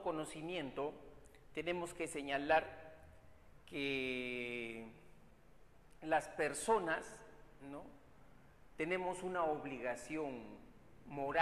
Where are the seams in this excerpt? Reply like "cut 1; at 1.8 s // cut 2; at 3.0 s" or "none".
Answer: none